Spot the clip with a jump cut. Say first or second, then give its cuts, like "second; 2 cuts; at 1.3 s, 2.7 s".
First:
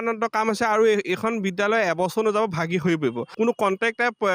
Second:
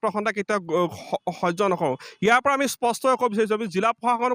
first; 1 cut; at 3.2 s